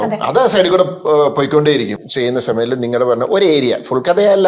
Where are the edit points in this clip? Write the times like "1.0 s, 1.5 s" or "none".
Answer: 2.0 s